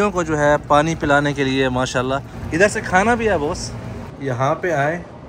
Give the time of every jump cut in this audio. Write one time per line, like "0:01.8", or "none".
0:02.4
0:04.2